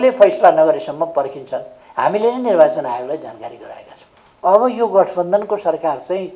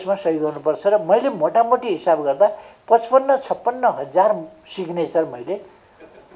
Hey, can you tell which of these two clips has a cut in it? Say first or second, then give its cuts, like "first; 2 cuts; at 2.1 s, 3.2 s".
first; 1 cut; at 4.4 s